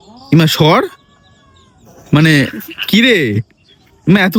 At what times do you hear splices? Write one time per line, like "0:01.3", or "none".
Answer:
none